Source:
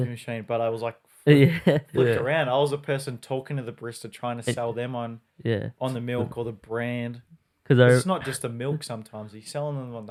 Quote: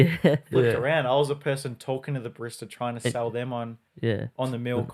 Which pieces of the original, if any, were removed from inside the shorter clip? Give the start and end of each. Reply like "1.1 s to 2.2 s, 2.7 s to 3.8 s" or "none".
none